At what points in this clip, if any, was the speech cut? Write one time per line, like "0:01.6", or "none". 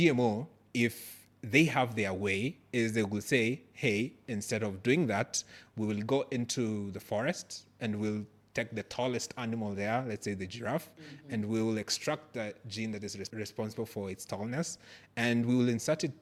none